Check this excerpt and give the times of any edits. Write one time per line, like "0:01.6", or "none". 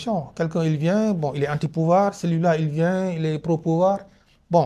none